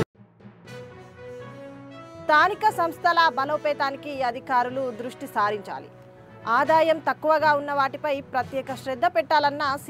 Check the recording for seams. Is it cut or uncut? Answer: cut